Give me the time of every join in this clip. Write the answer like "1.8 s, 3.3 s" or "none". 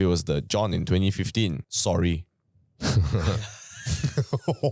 1.7 s

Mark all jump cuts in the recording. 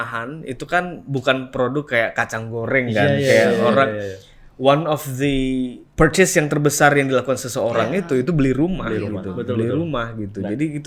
none

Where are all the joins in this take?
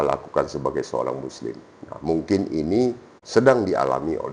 3.1 s

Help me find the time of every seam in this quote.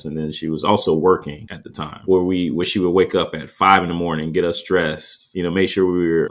2.0 s

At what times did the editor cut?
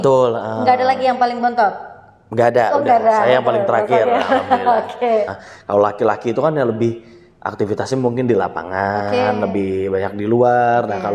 5.3 s

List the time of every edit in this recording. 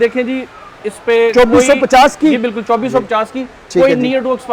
none

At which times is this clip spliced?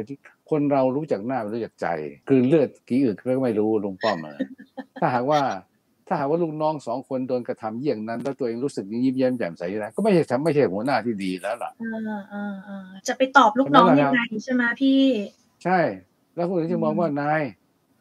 2.1 s

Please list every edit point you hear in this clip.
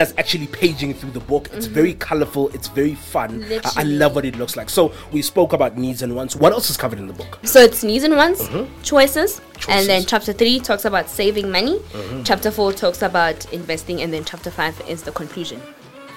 5.1 s, 6.4 s

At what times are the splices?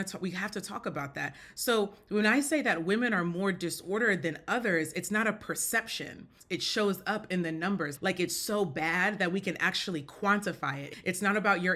6.3 s, 7.9 s, 10.9 s

